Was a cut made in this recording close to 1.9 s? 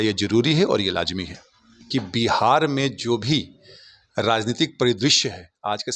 yes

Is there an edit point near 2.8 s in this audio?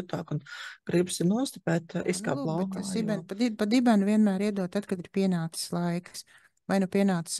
yes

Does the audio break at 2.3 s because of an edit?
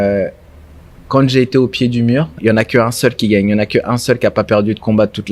yes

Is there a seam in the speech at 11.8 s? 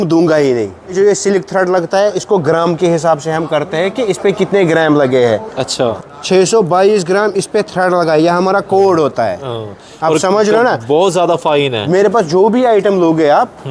yes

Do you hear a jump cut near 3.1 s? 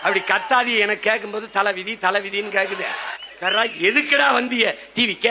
yes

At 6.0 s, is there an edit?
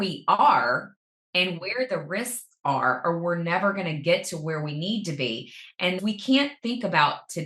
yes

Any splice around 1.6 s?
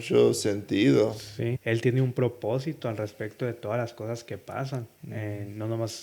yes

